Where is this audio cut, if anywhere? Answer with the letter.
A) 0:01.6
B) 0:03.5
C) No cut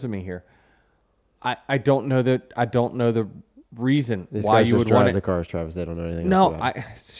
C